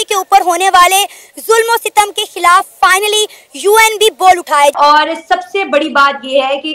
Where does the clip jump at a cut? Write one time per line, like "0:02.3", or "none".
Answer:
0:04.7